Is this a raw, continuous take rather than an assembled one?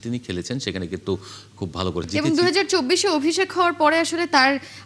no; 1 cut; at 2.1 s

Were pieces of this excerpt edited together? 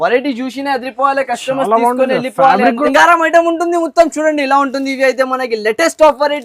yes; 1 cut; at 2.8 s

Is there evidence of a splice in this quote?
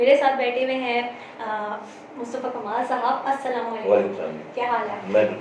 no; 0 cuts

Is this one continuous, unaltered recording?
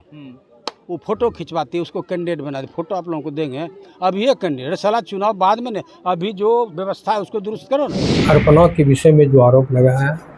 no; 1 cut; at 8.1 s

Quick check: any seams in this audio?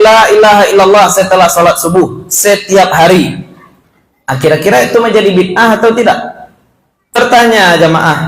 yes; 1 cut; at 7.2 s

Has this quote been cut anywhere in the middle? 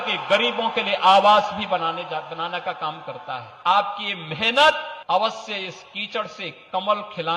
yes; 2 cuts; at 3.5 s, 4.9 s

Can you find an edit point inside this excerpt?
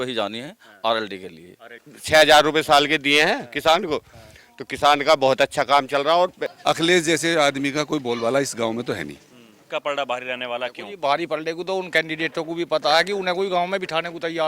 yes; 3 cuts; at 1.9 s, 6.5 s, 9.6 s

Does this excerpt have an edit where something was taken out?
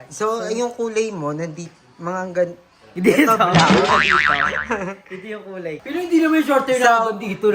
yes; 1 cut; at 5.8 s

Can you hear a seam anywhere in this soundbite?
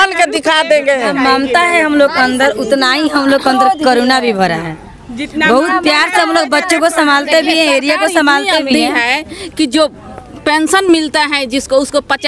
no; 0 cuts

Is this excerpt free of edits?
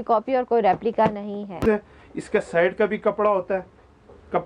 no; 1 cut; at 1.6 s

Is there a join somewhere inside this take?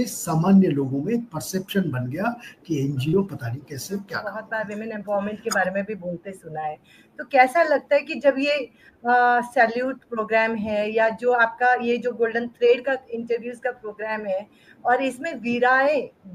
yes; 1 cut; at 4.4 s

